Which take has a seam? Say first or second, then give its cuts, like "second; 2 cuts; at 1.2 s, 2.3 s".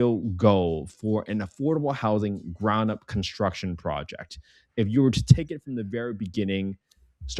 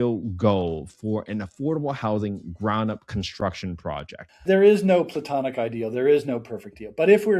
second; 1 cut; at 4.3 s